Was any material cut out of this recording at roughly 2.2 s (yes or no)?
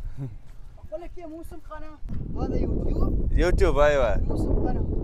yes